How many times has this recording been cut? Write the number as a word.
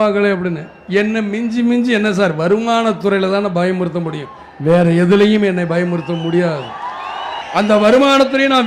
one